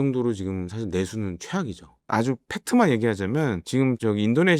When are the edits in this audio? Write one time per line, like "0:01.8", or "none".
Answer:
0:02.0
0:03.7